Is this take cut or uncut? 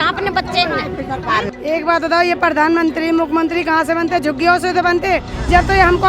cut